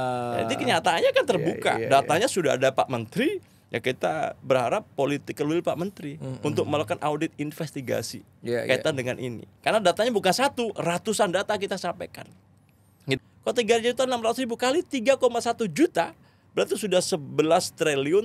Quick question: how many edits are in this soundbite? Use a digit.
1